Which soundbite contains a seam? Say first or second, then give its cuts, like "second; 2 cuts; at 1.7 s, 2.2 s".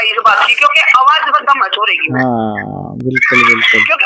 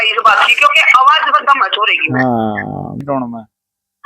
second; 1 cut; at 3.0 s